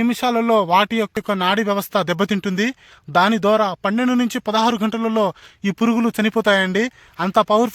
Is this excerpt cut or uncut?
cut